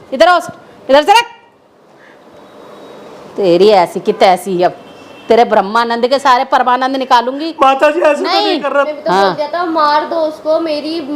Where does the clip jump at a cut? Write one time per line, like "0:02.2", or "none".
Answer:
0:08.9

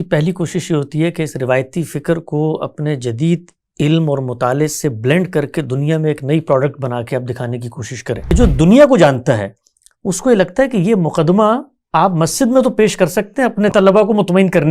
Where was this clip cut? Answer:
0:08.3
0:13.7

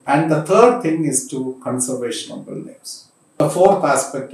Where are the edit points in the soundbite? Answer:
0:03.4

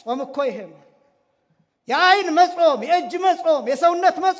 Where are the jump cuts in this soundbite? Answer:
none

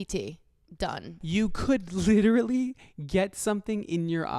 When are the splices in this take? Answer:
0:01.2

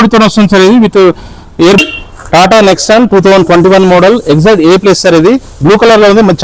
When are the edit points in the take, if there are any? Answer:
0:01.8

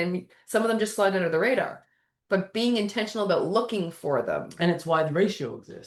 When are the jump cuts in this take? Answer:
none

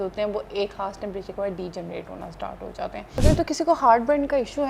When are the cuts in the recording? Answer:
0:03.2

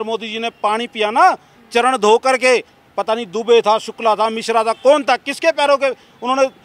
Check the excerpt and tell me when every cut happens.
none

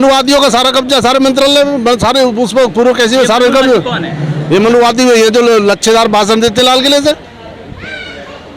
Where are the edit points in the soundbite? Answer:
none

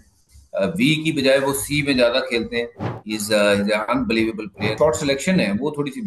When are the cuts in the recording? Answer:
0:02.8
0:04.7

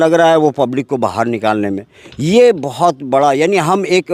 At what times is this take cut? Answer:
none

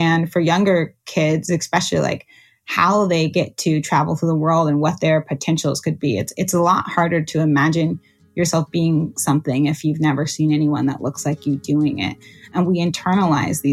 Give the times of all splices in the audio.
0:12.5

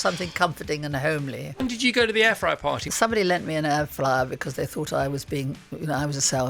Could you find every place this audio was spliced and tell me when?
0:01.6
0:02.8

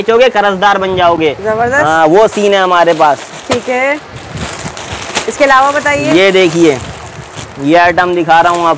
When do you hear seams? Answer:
none

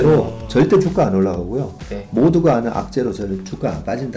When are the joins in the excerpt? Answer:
none

